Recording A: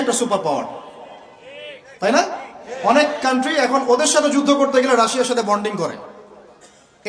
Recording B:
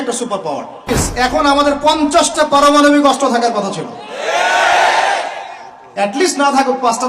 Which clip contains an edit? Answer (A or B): B